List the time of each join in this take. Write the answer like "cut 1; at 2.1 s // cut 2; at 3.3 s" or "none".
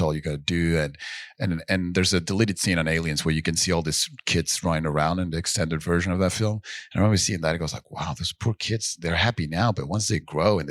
none